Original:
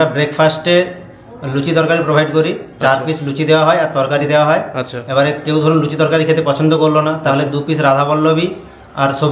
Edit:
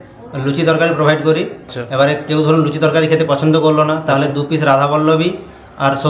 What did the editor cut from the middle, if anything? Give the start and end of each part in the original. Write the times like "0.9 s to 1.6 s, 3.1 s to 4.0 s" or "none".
2.7 s to 4.8 s